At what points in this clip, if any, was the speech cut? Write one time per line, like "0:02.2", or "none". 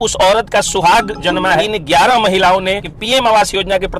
0:01.6
0:02.9